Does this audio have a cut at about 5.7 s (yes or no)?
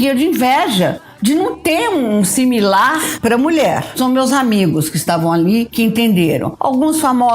yes